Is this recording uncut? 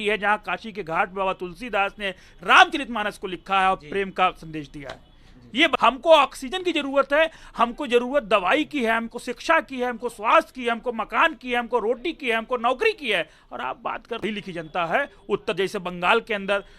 no; 2 cuts; at 5.8 s, 14.2 s

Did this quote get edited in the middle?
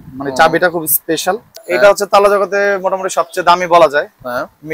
yes; 1 cut; at 1.5 s

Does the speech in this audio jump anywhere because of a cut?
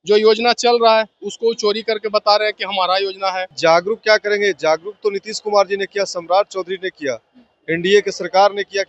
yes; 1 cut; at 3.5 s

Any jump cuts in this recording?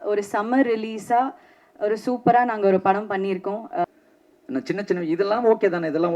yes; 1 cut; at 3.8 s

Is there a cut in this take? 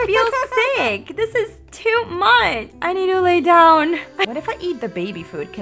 yes; 1 cut; at 4.2 s

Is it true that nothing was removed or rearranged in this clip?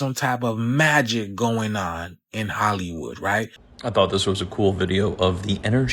no; 1 cut; at 3.6 s

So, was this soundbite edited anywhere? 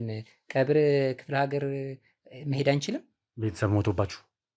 no; 0 cuts

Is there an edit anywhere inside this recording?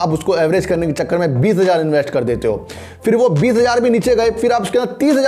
no; 0 cuts

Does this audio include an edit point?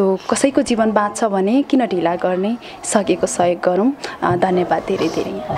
no; 0 cuts

